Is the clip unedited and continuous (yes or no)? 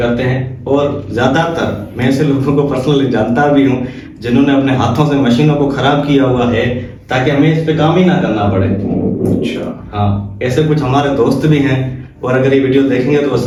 yes